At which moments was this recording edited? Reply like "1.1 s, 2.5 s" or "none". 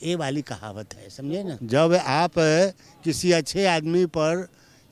1.5 s